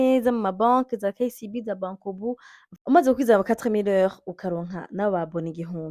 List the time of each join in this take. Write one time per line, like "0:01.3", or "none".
0:02.6